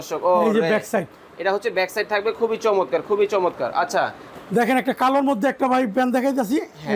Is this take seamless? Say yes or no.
yes